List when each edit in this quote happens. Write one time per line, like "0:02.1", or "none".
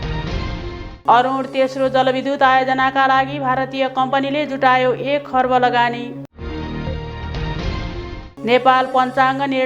0:00.9